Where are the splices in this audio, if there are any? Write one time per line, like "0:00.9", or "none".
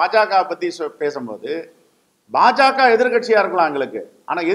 none